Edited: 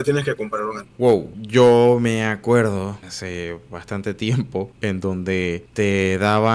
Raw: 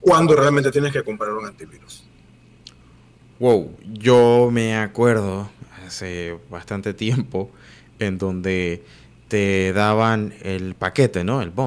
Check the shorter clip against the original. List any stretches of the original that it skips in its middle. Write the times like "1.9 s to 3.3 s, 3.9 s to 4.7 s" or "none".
2.0 s to 3.8 s, 5.6 s to 5.9 s, 7.5 s to 7.9 s, 8.8 s to 9.2 s